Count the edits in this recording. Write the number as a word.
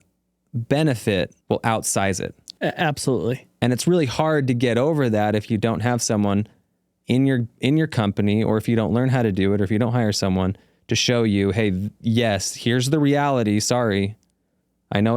three